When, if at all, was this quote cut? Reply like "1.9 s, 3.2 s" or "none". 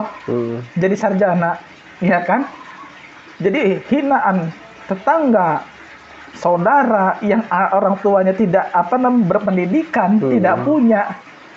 none